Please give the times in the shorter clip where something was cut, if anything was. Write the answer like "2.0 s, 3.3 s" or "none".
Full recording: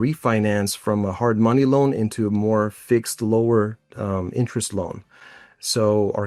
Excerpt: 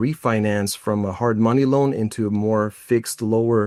none